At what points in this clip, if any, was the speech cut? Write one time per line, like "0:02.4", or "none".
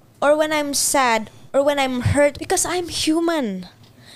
0:02.4